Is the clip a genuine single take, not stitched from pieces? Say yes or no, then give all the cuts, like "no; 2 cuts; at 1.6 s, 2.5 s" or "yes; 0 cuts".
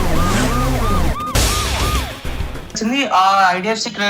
no; 1 cut; at 2.8 s